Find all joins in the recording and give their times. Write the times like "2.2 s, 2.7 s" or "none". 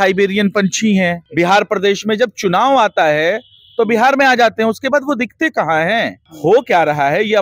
1.2 s, 6.2 s